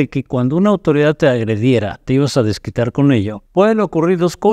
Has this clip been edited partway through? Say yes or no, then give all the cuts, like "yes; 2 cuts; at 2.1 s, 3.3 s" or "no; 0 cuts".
yes; 1 cut; at 3.4 s